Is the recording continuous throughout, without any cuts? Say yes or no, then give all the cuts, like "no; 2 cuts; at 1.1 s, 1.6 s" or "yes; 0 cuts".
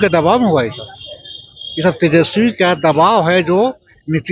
yes; 0 cuts